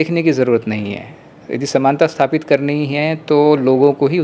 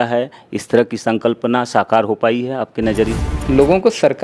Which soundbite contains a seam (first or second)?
second